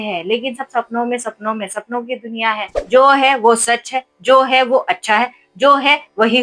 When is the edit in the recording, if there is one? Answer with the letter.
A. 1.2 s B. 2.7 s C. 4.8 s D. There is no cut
B